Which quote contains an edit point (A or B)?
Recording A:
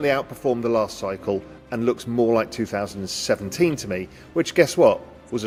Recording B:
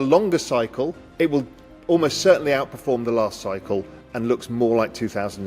B